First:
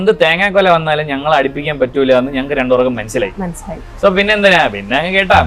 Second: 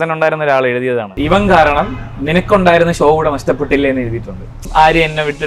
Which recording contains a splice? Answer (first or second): second